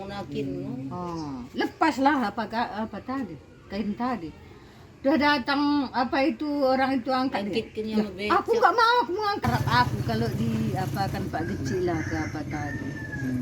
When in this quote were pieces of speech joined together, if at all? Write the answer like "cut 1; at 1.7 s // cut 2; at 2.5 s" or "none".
cut 1; at 9.4 s